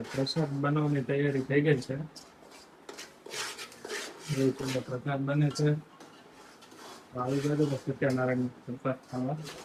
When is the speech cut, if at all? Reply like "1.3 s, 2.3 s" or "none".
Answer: none

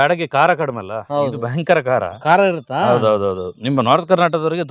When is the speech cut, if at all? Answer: none

